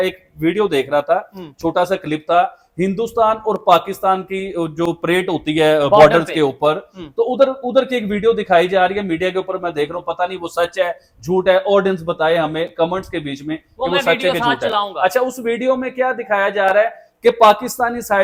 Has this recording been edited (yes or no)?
no